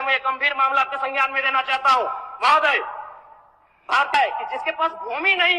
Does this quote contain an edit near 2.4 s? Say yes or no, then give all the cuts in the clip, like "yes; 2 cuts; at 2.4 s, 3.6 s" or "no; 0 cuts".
no; 1 cut; at 4.1 s